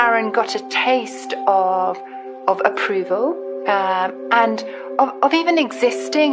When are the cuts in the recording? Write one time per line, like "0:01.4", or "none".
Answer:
none